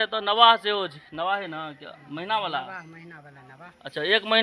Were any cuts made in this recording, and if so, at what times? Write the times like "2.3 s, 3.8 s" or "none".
none